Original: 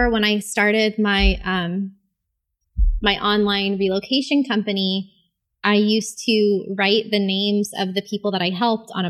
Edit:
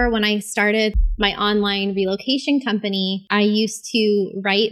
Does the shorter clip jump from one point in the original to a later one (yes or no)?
yes